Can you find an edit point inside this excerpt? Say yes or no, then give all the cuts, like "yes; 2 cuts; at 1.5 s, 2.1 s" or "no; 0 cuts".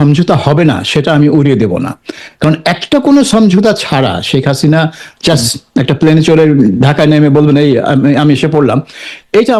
no; 0 cuts